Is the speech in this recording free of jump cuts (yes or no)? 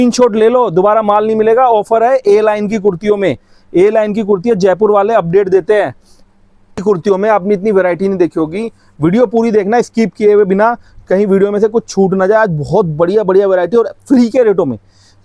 no